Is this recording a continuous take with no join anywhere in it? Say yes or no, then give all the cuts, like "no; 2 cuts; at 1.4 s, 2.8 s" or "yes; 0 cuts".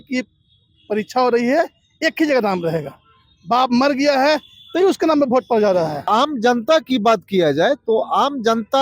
no; 1 cut; at 6.0 s